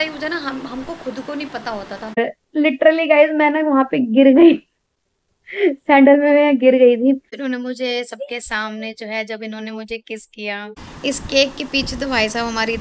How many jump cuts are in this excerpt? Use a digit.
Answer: 3